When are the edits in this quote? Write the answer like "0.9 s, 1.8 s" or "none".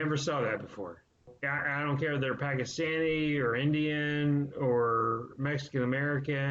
1.3 s